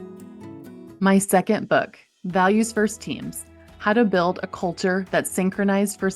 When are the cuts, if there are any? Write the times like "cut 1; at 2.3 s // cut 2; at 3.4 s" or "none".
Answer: cut 1; at 0.9 s